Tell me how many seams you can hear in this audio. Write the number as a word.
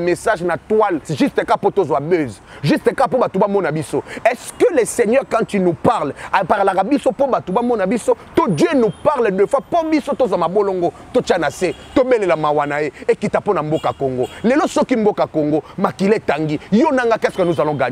one